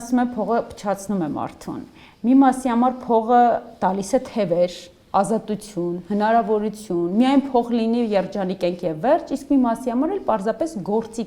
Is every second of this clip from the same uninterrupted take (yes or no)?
yes